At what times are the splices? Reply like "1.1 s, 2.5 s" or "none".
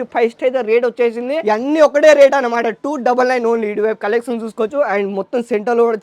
1.4 s